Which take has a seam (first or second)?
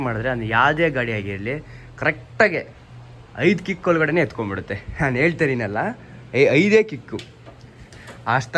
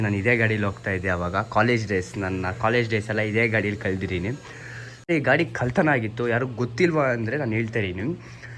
second